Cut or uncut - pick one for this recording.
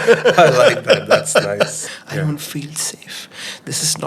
cut